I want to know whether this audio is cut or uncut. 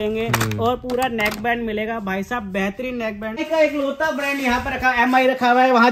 cut